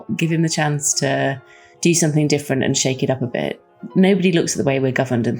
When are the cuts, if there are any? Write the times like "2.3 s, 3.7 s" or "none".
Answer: none